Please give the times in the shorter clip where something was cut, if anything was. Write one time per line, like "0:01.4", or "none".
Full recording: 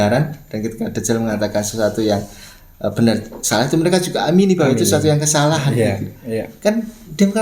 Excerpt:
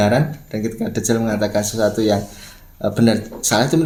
none